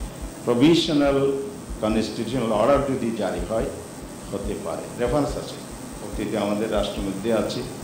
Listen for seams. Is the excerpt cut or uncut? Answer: uncut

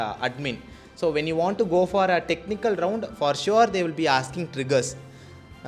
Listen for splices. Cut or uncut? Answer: uncut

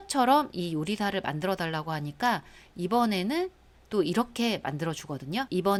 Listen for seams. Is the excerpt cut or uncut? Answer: uncut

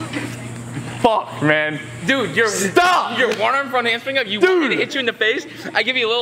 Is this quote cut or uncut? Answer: cut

